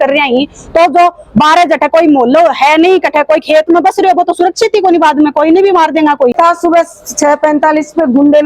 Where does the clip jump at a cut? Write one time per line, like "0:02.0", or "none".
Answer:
0:06.3